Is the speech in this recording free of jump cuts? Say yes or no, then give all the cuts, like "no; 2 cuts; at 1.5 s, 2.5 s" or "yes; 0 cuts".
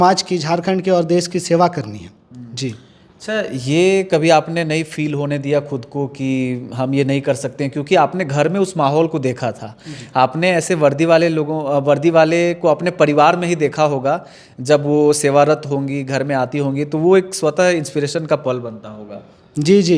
yes; 0 cuts